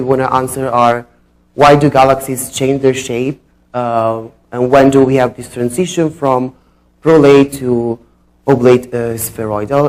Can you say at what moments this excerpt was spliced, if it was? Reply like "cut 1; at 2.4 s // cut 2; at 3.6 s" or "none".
cut 1; at 8.7 s